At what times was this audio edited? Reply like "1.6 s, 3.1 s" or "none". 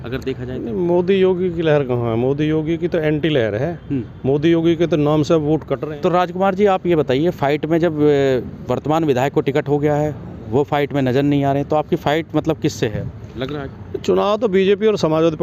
5.8 s